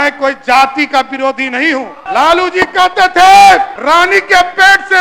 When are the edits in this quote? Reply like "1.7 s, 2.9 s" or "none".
2.0 s, 3.8 s